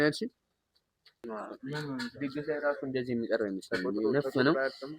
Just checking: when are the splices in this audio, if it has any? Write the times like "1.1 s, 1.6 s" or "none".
1.2 s